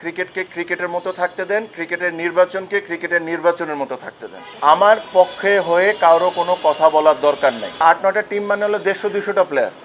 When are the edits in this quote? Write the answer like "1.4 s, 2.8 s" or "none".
4.4 s, 7.8 s